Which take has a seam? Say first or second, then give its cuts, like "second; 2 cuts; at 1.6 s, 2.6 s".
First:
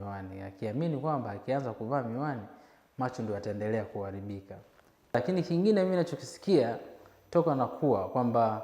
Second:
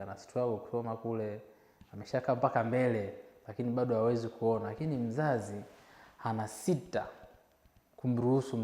first; 1 cut; at 5.1 s